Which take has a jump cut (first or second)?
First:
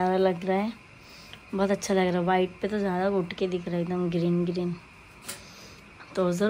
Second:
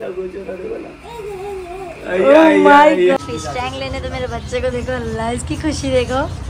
second